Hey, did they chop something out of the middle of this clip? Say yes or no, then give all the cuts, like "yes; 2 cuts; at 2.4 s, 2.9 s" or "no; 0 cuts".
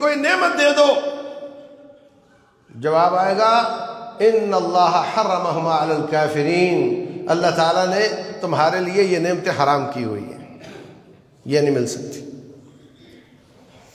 no; 0 cuts